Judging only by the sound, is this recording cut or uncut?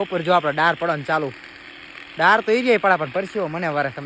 uncut